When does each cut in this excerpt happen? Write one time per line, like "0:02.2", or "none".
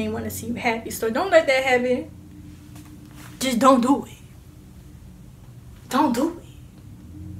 none